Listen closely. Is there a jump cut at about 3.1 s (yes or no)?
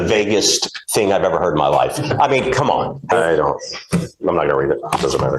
yes